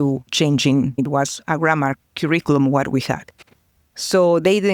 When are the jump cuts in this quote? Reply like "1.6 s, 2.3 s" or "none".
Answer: 1.0 s